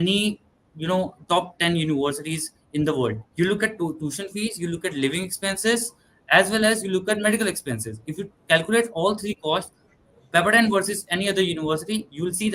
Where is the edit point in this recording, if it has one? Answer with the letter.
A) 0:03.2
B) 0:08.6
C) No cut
A